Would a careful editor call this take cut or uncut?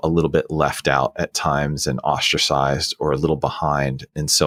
uncut